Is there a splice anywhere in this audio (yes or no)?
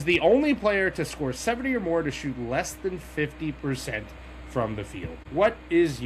yes